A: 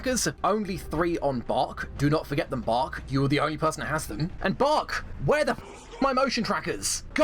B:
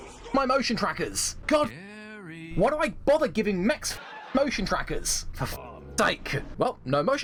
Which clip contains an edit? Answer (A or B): A